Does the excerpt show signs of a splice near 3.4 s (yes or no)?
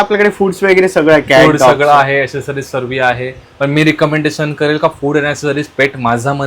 no